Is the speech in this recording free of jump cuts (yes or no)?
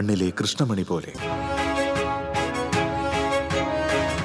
no